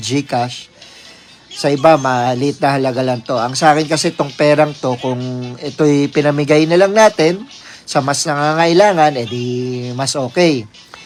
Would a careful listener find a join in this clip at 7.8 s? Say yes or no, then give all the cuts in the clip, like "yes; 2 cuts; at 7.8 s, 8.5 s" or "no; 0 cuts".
no; 0 cuts